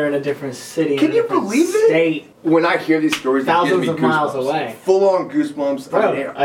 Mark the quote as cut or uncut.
cut